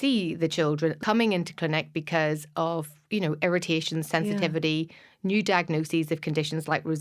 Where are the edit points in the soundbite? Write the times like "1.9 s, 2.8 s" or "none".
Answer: 1.0 s